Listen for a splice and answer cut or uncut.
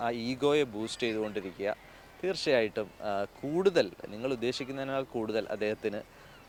uncut